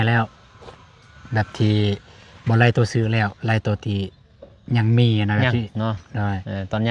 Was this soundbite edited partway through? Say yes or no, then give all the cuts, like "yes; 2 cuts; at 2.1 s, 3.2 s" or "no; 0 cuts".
no; 0 cuts